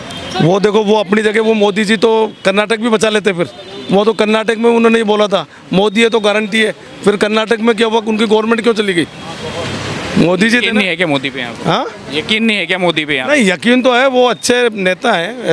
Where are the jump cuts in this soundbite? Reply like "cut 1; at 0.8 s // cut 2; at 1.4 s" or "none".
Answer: none